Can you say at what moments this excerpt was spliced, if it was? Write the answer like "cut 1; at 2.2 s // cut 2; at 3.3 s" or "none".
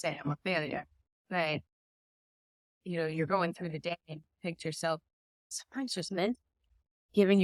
none